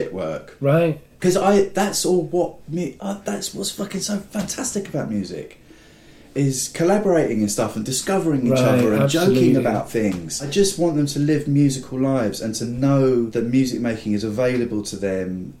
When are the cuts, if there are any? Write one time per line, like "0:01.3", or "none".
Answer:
0:10.5
0:13.3